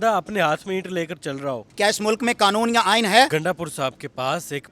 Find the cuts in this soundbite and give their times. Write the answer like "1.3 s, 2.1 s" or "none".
1.7 s, 3.3 s